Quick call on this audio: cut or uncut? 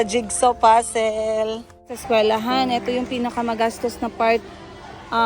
cut